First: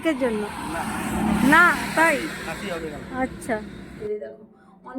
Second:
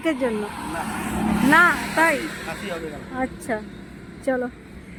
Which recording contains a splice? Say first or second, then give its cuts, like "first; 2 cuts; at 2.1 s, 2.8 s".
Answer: first; 1 cut; at 4.0 s